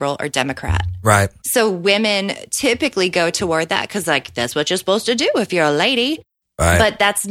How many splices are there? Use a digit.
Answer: 0